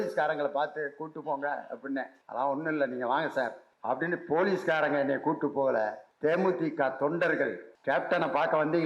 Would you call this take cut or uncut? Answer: cut